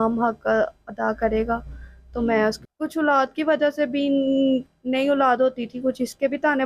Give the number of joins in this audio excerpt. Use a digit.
1